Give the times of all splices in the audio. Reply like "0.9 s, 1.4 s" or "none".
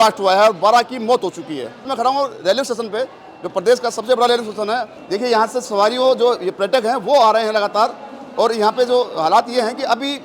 1.9 s, 5.0 s